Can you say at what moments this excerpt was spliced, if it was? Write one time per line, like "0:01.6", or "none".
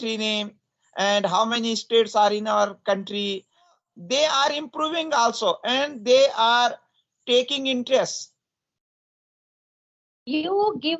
0:03.8